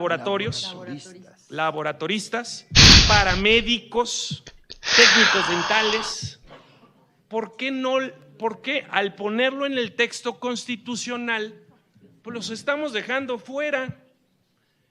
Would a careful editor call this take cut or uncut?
cut